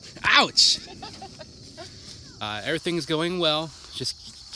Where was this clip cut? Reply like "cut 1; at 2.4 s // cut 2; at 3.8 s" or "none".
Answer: cut 1; at 2.3 s